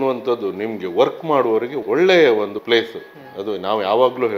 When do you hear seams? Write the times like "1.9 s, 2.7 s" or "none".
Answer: 1.8 s, 2.6 s